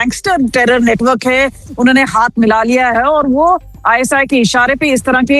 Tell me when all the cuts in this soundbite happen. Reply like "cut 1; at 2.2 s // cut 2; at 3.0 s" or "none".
none